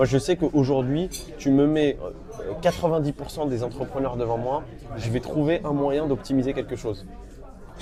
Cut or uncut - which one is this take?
uncut